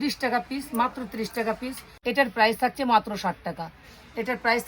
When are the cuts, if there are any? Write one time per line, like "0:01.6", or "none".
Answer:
0:01.9